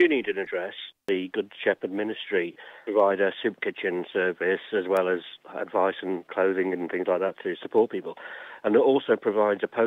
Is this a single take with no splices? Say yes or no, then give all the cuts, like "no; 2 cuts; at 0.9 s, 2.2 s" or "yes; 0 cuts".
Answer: no; 2 cuts; at 1.0 s, 2.8 s